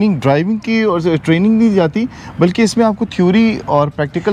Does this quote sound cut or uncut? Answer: uncut